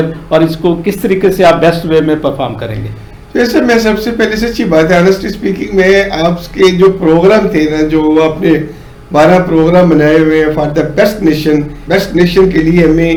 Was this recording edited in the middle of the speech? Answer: no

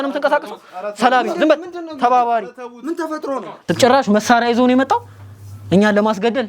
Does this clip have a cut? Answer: yes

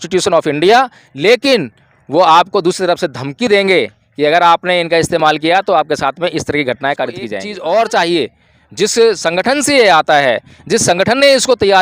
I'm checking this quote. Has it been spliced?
yes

